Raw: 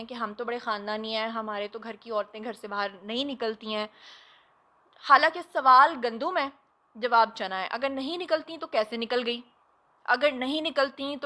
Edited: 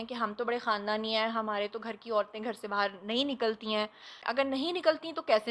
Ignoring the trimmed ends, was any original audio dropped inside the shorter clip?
yes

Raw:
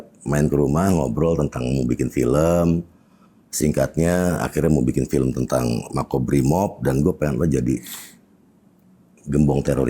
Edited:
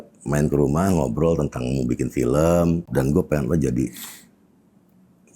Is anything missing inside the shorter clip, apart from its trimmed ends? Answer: yes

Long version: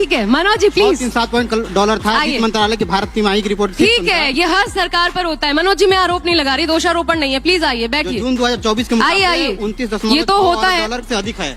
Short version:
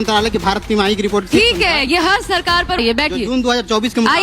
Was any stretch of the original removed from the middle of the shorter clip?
yes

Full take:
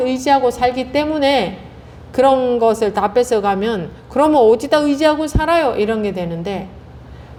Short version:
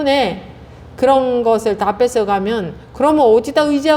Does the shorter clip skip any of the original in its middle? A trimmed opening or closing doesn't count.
no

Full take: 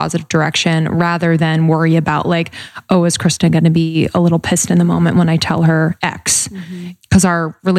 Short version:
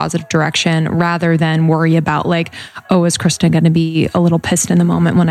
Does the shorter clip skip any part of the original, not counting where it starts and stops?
no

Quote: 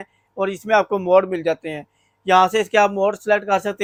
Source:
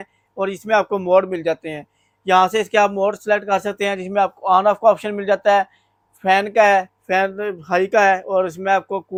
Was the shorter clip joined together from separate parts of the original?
no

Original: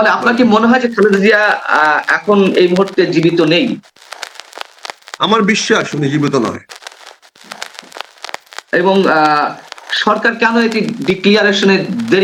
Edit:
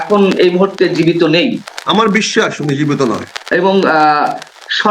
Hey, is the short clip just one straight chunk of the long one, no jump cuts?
no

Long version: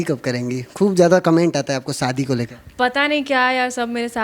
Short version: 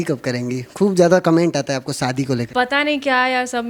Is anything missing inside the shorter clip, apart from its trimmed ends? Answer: yes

